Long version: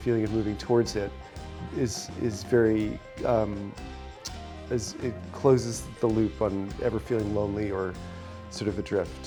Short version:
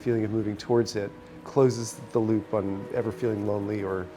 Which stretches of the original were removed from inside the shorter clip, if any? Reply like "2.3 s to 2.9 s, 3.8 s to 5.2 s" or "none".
1.4 s to 5.2 s